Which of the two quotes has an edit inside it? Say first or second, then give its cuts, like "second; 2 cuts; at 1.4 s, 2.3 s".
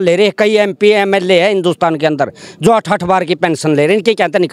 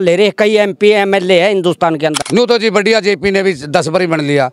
second; 1 cut; at 2.2 s